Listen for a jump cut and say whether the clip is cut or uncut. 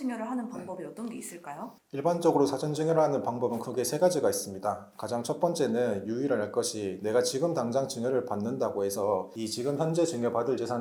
uncut